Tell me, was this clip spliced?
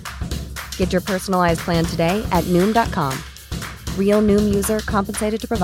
no; 0 cuts

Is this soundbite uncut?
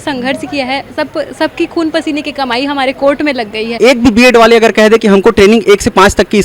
no; 1 cut; at 3.8 s

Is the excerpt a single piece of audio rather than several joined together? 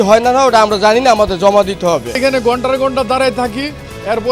no; 1 cut; at 2.2 s

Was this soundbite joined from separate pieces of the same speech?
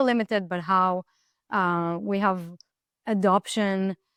no; 0 cuts

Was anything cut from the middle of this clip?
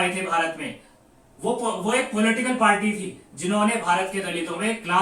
no; 0 cuts

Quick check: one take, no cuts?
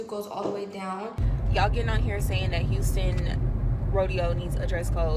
no; 1 cut; at 1.2 s

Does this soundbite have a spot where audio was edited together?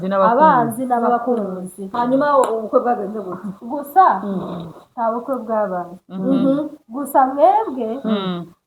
yes; 1 cut; at 1.8 s

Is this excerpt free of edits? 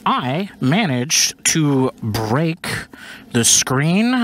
yes; 0 cuts

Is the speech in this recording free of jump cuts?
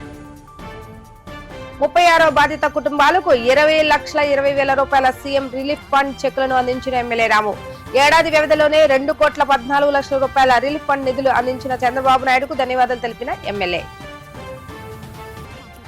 no; 1 cut; at 1.8 s

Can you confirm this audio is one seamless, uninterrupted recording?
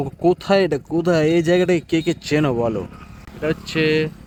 yes; 0 cuts

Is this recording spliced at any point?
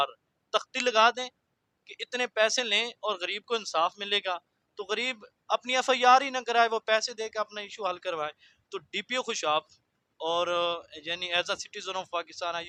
no; 0 cuts

